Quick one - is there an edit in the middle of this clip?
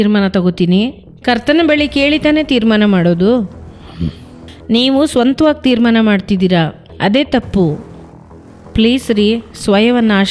no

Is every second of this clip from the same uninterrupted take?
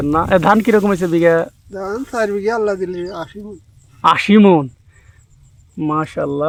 yes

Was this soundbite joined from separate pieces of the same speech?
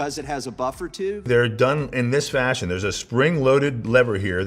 yes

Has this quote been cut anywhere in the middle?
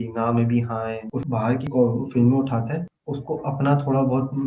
yes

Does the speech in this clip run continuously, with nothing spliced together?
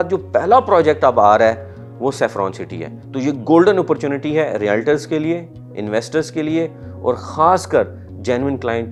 yes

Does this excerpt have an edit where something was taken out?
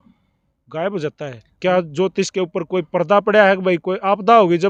no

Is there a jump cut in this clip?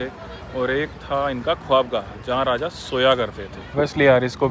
no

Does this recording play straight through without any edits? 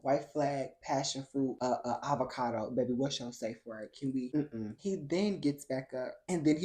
yes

